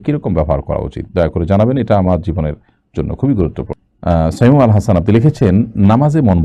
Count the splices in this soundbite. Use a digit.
1